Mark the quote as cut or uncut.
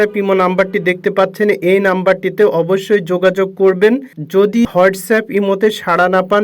cut